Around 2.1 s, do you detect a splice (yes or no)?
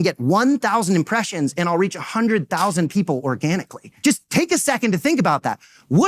no